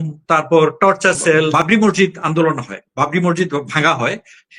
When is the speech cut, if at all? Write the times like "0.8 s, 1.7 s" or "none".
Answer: 1.5 s